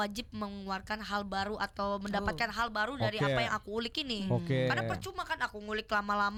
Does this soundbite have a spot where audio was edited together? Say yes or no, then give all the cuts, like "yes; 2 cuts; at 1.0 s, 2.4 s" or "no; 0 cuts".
no; 0 cuts